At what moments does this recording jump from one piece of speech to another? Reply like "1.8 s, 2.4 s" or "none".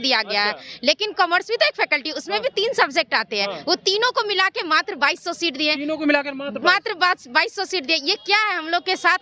none